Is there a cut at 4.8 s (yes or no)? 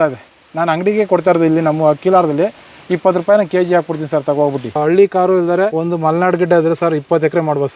yes